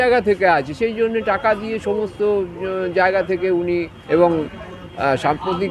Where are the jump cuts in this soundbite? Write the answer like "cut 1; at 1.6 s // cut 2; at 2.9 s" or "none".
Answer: none